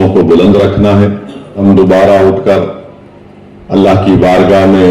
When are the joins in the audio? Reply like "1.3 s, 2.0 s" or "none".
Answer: 1.6 s

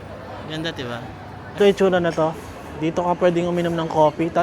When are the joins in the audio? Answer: 1.6 s

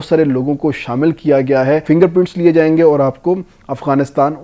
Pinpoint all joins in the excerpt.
1.8 s

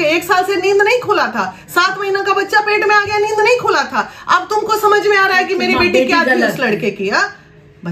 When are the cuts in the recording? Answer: none

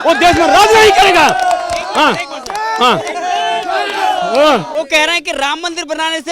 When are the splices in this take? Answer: 4.7 s

